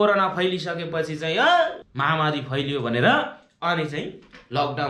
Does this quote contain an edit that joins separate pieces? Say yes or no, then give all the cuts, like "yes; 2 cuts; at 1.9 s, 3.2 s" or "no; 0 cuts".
yes; 1 cut; at 1.9 s